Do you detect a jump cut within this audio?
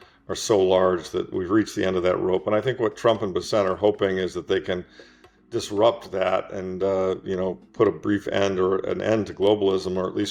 no; 0 cuts

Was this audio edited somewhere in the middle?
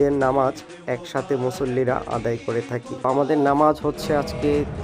no; 0 cuts

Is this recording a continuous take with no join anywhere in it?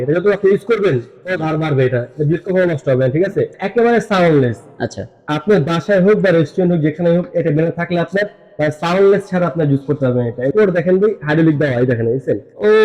no; 2 cuts; at 3.6 s, 10.5 s

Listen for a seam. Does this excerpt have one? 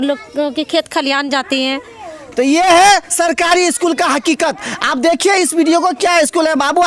no; 0 cuts

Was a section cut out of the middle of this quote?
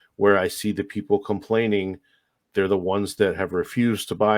no; 0 cuts

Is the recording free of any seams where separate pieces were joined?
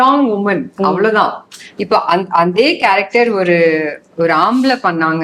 yes; 0 cuts

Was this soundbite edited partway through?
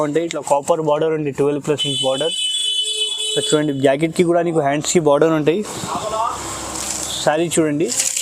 no; 0 cuts

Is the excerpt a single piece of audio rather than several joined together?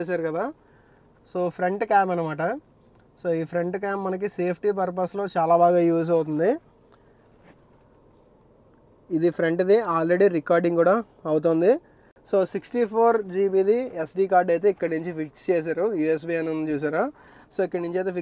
yes; 0 cuts

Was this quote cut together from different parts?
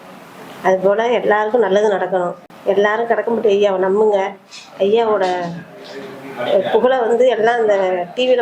yes; 1 cut; at 2.4 s

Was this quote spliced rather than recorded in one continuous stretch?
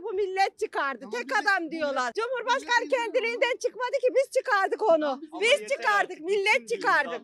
no; 0 cuts

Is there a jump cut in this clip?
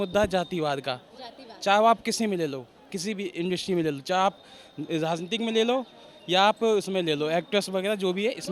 no; 0 cuts

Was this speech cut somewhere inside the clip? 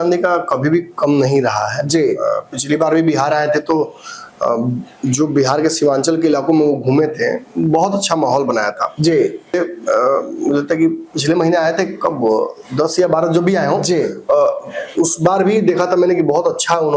yes; 1 cut; at 9.5 s

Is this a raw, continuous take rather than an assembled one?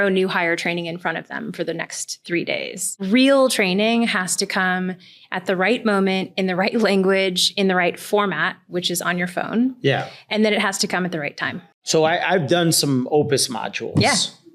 no; 1 cut; at 2.9 s

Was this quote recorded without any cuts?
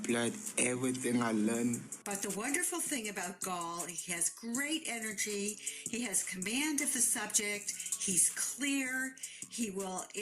no; 2 cuts; at 1.0 s, 1.9 s

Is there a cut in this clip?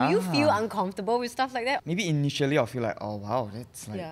yes; 1 cut; at 1.8 s

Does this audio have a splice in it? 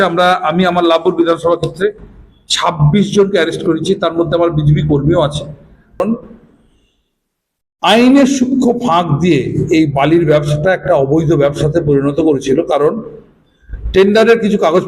yes; 1 cut; at 6.0 s

